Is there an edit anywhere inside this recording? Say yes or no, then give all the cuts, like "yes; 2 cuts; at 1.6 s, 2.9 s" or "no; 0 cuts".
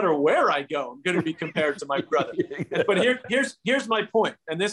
no; 0 cuts